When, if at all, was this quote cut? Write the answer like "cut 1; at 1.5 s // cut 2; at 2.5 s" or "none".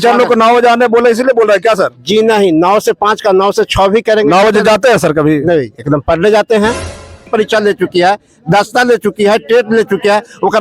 cut 1; at 7.3 s